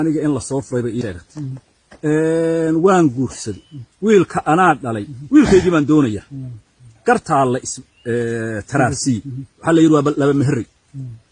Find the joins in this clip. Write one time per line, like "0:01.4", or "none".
0:01.1